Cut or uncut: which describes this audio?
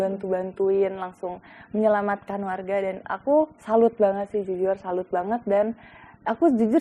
uncut